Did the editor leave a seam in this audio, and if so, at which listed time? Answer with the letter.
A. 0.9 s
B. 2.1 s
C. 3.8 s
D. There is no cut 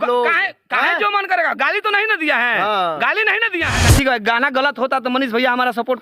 C